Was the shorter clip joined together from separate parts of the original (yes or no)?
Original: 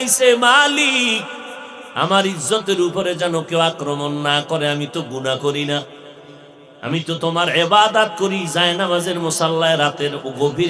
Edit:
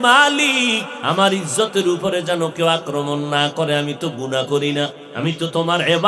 yes